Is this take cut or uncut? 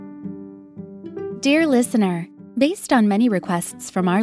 cut